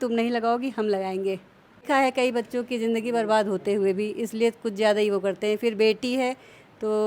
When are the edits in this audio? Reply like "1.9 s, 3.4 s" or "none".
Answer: 1.8 s